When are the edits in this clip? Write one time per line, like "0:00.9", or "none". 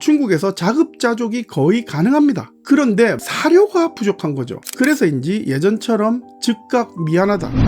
0:04.6

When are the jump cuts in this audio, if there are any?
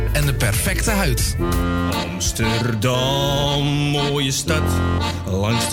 0:01.3

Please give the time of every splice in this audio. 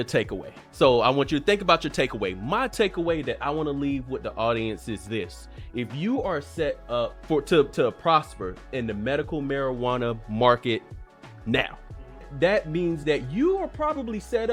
none

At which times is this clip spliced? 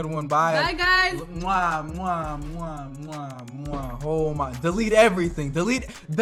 none

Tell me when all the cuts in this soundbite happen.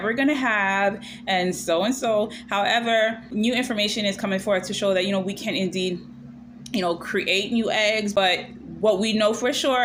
none

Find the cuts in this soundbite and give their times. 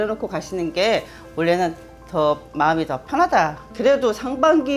0:03.6

